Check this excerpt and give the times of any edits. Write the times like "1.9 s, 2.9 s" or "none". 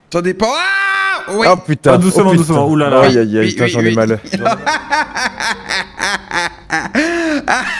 4.3 s